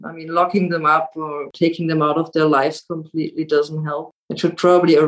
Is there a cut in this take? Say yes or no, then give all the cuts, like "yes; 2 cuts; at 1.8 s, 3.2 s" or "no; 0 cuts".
yes; 1 cut; at 1.4 s